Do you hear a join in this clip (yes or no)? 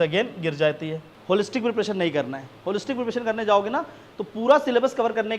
yes